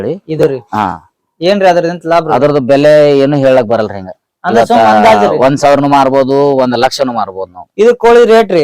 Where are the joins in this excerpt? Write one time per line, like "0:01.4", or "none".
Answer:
none